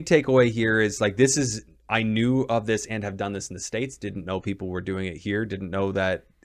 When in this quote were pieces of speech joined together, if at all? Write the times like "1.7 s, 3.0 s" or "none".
none